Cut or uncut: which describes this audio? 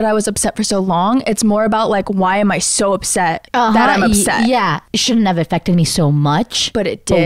cut